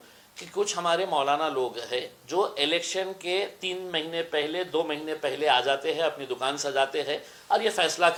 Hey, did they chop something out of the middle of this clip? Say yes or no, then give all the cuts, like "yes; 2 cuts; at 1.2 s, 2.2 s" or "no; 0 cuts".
no; 0 cuts